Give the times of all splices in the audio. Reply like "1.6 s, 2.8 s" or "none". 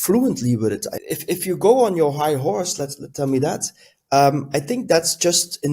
0.9 s